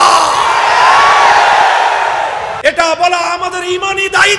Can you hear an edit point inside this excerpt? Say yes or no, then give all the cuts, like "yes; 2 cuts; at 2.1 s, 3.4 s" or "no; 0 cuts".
yes; 1 cut; at 2.5 s